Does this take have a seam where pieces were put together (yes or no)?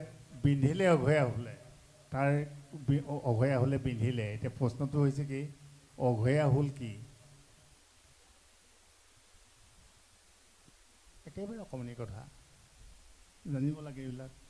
no